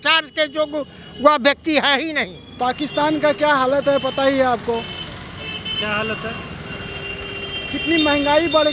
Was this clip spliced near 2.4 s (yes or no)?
yes